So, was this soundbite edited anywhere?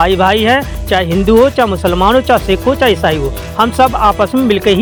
no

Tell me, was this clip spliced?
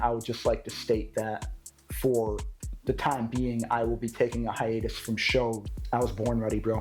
yes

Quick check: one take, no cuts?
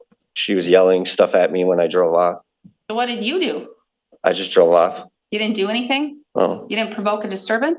yes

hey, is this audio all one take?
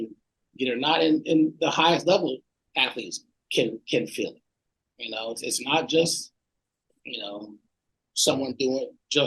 yes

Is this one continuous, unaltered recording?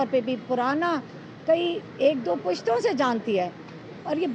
yes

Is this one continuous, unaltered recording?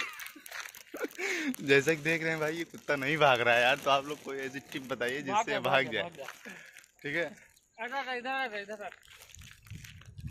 yes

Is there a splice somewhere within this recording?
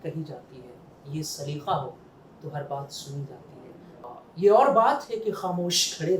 yes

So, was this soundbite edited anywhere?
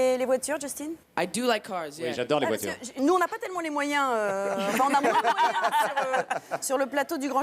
yes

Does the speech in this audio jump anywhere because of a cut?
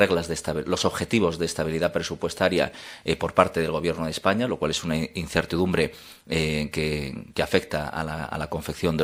no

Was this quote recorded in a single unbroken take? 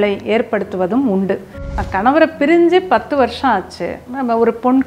no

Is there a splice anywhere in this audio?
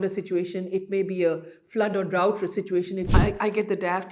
yes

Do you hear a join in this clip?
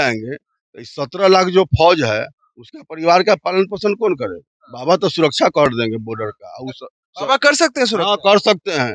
no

